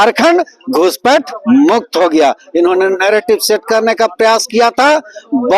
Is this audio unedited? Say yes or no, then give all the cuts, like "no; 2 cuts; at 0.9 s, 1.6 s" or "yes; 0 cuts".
yes; 0 cuts